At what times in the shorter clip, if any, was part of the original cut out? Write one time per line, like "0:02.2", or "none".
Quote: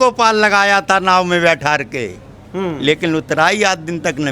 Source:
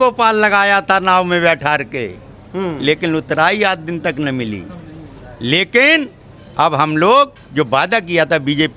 none